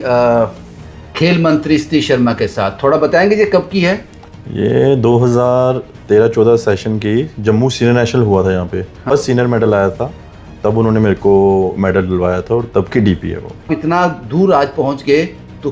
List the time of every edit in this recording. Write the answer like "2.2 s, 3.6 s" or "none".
9.0 s, 13.7 s

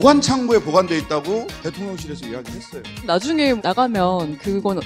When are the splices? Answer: none

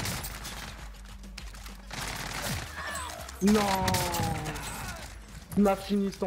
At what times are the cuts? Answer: 4.0 s

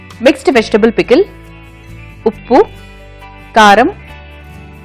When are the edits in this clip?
none

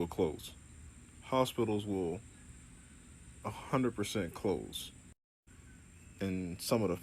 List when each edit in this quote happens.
none

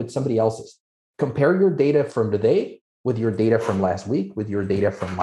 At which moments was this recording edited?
none

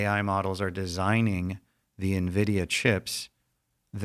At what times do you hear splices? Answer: none

